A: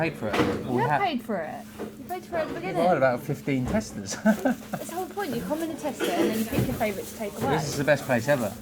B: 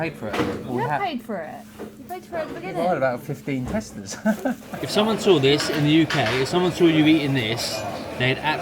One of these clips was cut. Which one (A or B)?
B